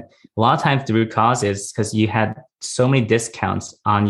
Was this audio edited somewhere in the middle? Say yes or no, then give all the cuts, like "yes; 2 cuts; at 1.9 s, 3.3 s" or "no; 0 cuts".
no; 0 cuts